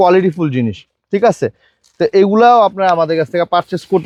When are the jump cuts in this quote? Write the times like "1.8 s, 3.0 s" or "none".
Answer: none